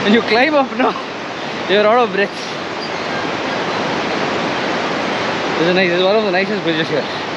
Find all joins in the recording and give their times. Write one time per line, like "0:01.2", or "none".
none